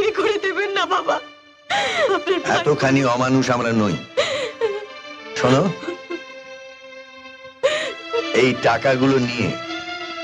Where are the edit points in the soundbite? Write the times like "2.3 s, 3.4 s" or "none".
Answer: none